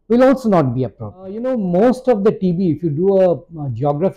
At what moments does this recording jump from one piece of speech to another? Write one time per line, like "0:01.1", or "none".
0:01.4